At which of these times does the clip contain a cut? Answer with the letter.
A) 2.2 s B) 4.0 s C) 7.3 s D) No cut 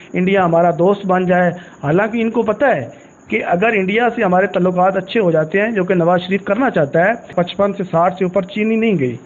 C